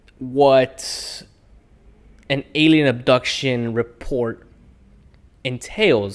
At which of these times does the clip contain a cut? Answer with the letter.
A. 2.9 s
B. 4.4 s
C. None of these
C